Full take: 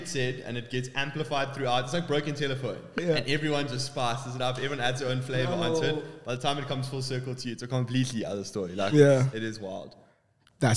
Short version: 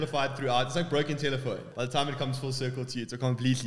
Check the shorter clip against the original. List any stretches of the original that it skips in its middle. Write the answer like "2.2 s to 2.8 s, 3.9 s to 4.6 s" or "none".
2.8 s to 6.2 s